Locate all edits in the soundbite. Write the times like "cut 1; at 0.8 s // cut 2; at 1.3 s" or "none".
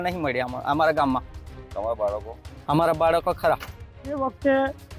none